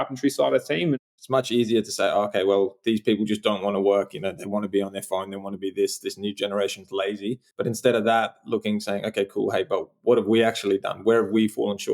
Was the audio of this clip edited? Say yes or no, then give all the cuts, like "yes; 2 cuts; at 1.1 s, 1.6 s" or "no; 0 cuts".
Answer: yes; 2 cuts; at 1.0 s, 7.5 s